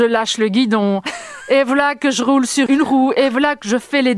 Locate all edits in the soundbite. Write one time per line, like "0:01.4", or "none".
0:02.7

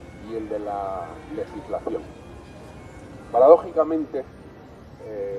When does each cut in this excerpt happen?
none

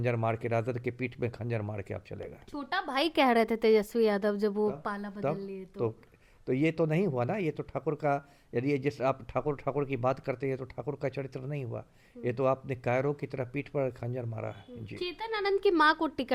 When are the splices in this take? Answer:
none

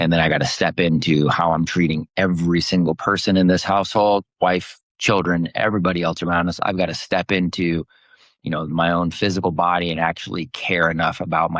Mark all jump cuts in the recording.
none

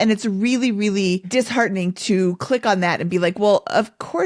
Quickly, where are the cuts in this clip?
0:01.2

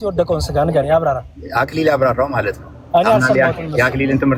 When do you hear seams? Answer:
none

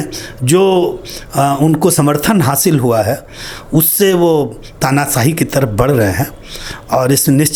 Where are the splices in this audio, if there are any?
none

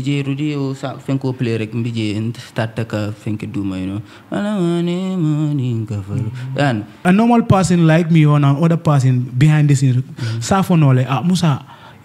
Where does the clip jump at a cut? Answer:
0:07.0

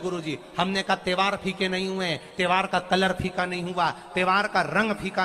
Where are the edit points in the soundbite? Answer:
none

